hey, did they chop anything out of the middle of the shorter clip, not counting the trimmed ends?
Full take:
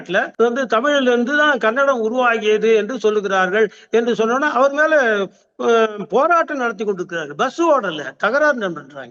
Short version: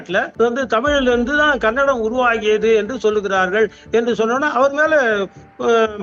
no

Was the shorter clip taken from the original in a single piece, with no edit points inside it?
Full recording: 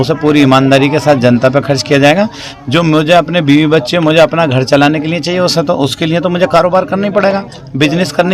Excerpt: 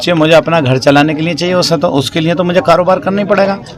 yes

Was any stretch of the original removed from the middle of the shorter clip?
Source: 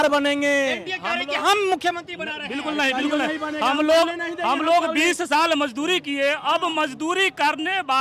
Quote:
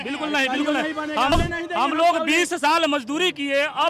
yes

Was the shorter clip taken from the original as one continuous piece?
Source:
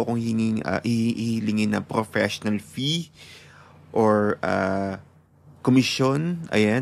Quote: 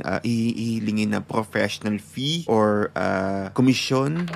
no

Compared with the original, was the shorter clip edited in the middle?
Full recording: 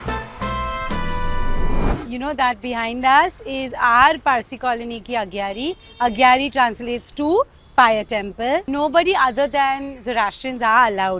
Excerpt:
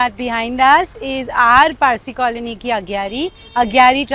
no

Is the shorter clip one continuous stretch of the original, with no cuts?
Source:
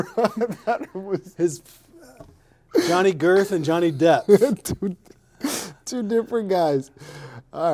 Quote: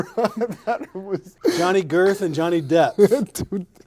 no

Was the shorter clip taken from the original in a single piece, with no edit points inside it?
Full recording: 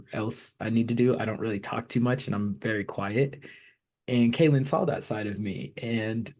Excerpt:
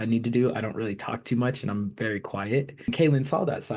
no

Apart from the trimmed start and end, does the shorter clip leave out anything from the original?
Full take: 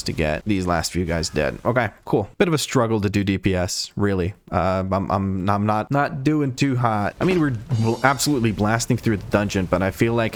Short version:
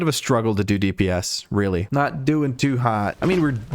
yes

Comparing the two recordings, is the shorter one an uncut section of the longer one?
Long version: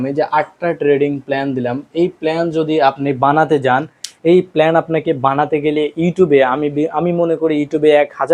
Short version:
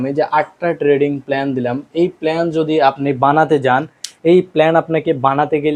yes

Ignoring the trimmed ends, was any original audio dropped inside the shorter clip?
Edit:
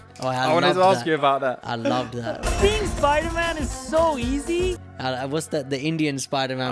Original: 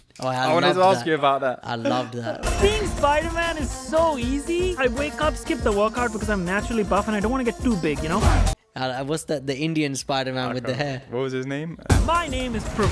yes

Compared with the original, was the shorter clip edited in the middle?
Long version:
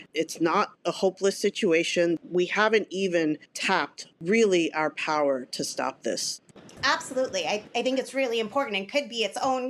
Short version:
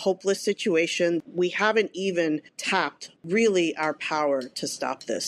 no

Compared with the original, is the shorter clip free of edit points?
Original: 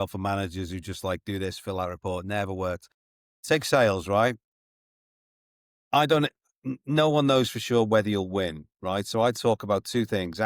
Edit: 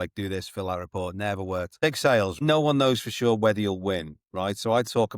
no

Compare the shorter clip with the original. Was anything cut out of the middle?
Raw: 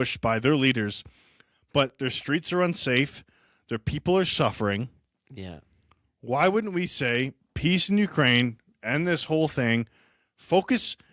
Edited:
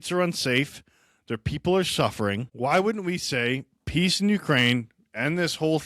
yes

